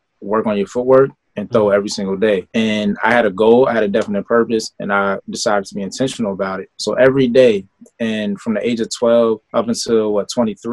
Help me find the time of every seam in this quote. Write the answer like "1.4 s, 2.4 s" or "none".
2.5 s, 6.7 s, 9.4 s